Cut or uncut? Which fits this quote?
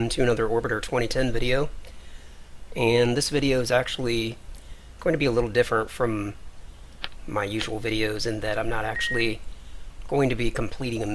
uncut